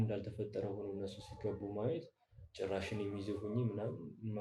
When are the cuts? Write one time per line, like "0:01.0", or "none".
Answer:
none